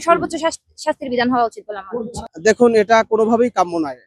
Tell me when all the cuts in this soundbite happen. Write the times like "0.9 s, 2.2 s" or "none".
none